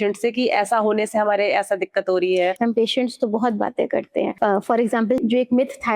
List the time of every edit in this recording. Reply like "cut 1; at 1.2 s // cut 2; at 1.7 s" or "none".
cut 1; at 2.6 s // cut 2; at 4.3 s // cut 3; at 5.2 s